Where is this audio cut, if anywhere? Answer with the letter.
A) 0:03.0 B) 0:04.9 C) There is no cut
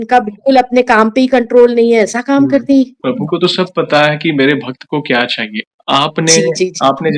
A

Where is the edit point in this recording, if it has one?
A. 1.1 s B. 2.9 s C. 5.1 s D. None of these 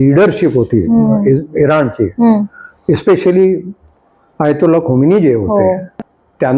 D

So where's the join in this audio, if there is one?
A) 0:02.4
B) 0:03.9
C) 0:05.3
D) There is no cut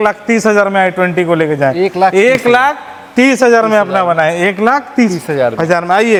D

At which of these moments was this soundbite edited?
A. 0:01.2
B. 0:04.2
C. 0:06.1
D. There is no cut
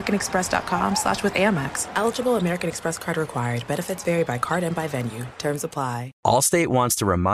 C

